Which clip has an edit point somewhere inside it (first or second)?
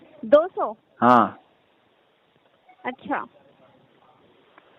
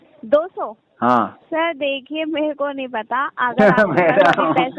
second